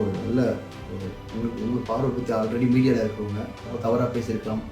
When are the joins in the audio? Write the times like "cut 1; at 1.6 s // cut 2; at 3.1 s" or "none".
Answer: cut 1; at 3.7 s